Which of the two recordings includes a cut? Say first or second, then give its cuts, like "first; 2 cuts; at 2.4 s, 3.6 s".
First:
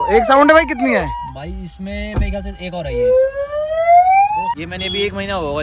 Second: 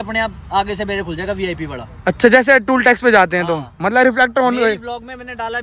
first; 1 cut; at 4.5 s